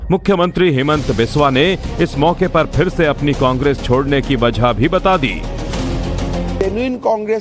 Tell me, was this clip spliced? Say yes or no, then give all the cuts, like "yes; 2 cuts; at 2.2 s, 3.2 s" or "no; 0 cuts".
no; 0 cuts